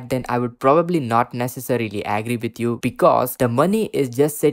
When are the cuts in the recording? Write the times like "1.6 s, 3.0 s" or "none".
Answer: 3.3 s